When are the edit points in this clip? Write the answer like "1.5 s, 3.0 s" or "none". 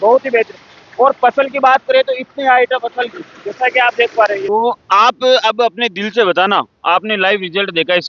4.4 s